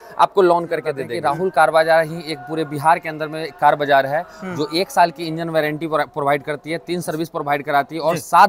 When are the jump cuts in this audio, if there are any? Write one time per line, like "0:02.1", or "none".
0:01.0